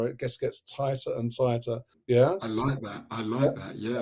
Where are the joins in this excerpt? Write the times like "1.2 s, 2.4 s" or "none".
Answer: none